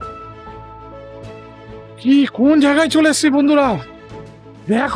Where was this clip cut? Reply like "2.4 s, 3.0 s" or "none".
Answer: none